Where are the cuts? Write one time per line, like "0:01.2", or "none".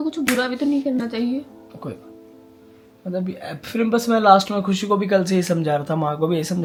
none